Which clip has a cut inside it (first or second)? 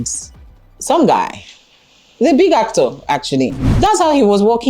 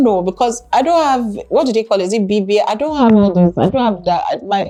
first